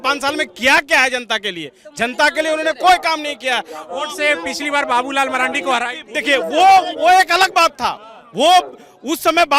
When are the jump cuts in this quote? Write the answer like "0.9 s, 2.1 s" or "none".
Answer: none